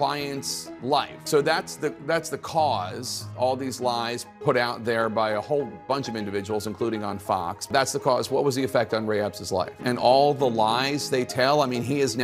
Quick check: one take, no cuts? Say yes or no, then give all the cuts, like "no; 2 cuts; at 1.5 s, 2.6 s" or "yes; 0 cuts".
no; 3 cuts; at 1.1 s, 7.6 s, 9.8 s